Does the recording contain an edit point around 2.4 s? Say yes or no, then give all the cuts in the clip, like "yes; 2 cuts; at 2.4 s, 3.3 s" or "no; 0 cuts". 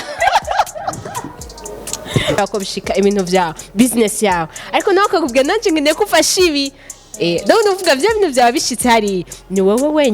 yes; 1 cut; at 2.4 s